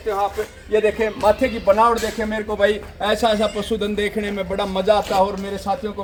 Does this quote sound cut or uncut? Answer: uncut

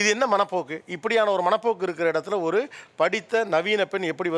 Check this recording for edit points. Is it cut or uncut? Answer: uncut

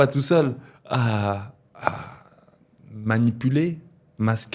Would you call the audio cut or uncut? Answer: uncut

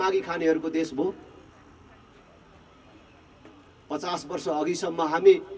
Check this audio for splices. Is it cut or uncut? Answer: uncut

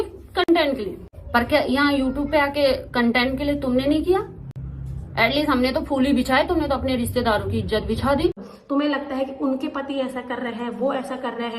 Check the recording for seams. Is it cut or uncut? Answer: cut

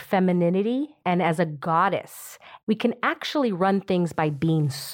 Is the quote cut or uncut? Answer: cut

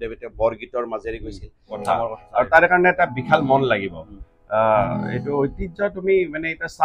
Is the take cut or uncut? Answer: cut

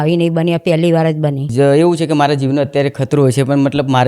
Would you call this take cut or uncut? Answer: cut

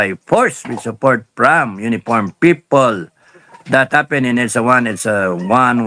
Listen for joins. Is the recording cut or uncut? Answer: uncut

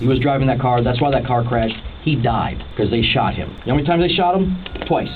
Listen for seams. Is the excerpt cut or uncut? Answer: cut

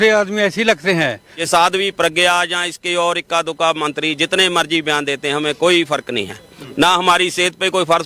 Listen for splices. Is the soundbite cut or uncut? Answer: cut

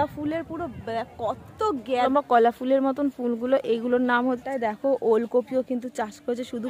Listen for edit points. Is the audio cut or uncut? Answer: cut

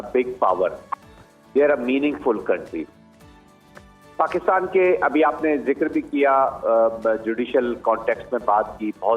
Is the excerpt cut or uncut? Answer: uncut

